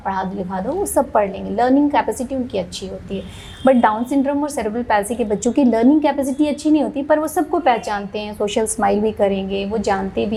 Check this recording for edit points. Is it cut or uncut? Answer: uncut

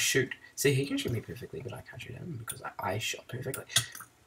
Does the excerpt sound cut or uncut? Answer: uncut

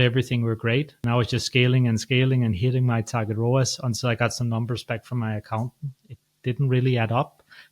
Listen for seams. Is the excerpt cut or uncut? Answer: cut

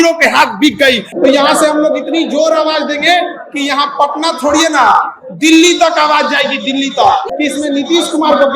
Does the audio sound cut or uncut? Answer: cut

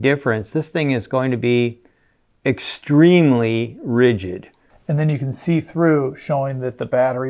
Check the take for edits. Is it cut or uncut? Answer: cut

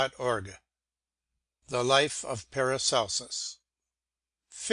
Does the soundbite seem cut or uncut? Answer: uncut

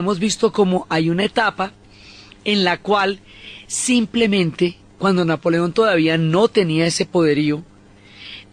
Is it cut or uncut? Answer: cut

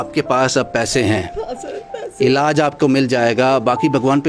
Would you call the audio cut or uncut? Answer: uncut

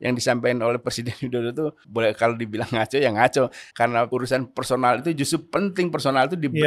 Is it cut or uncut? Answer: cut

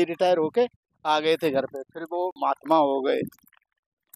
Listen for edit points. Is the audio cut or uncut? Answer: uncut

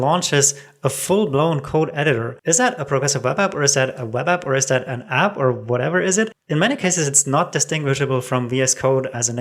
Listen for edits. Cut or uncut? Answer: cut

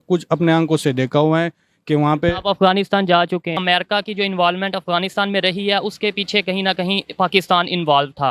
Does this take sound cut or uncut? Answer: cut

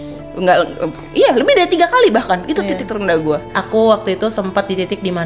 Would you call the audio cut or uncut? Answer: cut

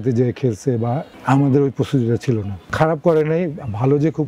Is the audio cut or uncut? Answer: cut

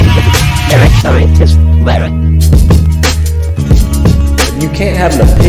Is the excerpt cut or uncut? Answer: uncut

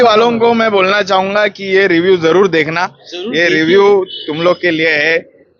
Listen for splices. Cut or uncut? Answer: uncut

